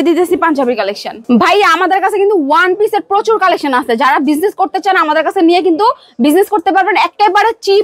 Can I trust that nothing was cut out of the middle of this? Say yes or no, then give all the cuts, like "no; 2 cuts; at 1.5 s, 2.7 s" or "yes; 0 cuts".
yes; 0 cuts